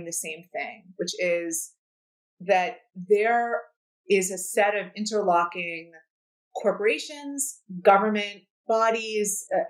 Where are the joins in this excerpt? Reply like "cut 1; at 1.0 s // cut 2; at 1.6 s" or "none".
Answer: cut 1; at 8.5 s